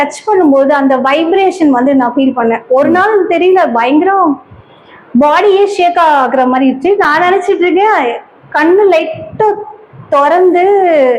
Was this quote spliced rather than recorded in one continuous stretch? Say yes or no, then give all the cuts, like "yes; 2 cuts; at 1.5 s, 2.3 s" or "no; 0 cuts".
no; 0 cuts